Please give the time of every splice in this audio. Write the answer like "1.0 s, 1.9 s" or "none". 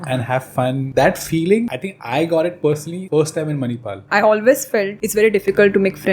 0.8 s, 1.9 s, 2.9 s, 3.9 s, 5.0 s